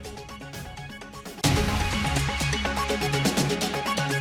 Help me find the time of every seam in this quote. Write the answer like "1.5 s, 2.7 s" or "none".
none